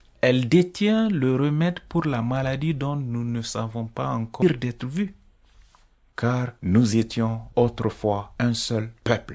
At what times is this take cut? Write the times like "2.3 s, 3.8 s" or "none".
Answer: 4.4 s